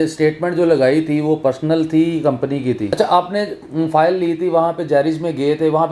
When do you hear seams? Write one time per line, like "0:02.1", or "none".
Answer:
0:02.9